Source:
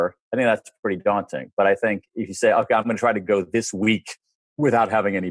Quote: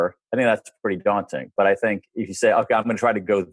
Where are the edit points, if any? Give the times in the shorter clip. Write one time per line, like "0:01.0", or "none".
none